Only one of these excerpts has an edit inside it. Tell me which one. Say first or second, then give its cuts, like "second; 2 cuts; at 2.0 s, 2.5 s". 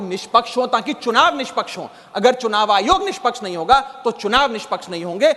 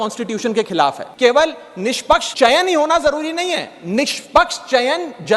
second; 2 cuts; at 1.1 s, 2.3 s